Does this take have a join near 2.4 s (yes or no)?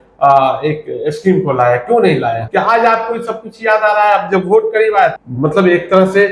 yes